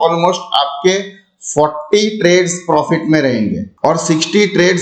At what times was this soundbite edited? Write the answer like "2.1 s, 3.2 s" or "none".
none